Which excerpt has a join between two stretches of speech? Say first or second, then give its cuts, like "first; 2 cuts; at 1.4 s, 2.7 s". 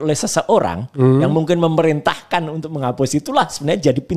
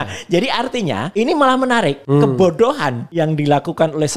second; 3 cuts; at 1.1 s, 2.0 s, 3.0 s